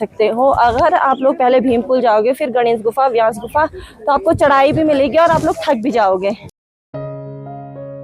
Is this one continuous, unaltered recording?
yes; 0 cuts

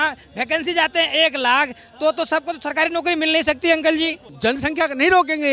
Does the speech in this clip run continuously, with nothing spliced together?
no; 1 cut; at 4.2 s

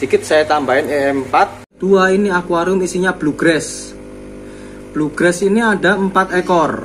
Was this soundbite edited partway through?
yes; 1 cut; at 1.7 s

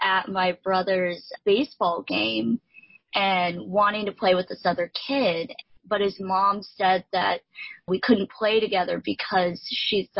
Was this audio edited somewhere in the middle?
yes; 1 cut; at 5.7 s

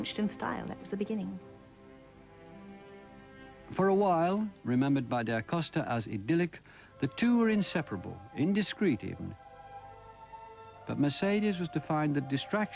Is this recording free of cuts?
no; 1 cut; at 3.9 s

